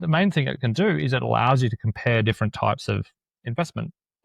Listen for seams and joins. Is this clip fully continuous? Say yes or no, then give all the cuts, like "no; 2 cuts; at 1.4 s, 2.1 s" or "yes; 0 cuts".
yes; 0 cuts